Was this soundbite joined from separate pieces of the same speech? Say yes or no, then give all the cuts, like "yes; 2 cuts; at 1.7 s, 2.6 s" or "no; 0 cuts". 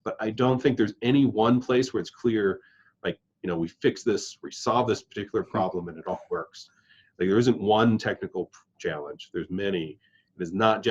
no; 0 cuts